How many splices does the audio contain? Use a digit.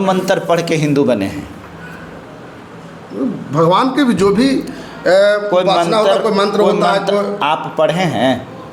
0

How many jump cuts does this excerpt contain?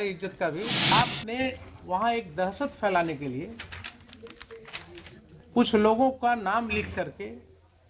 1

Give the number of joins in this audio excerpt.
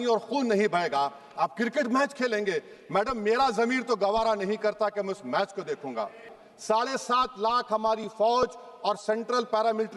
1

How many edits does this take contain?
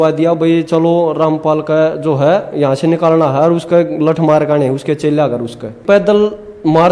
1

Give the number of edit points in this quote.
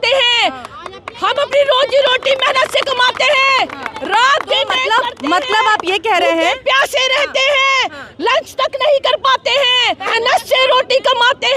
1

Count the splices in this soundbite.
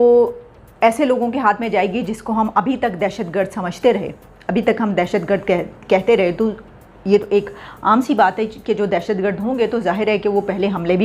0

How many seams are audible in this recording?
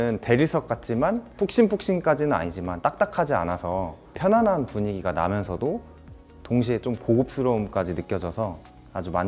2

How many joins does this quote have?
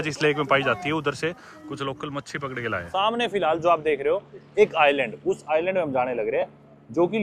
1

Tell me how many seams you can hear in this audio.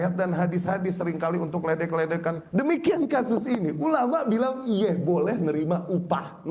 1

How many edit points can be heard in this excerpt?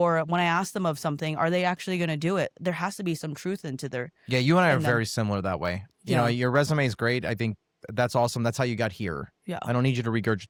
0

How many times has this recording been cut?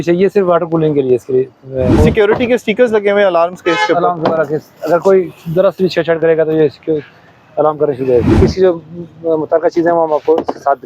2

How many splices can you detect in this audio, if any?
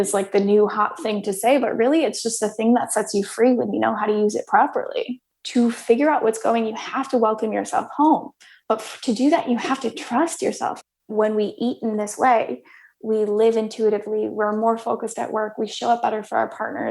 2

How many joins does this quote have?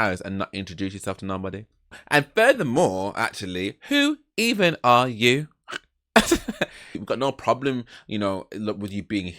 2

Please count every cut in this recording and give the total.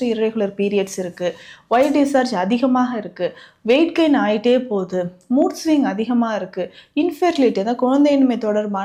0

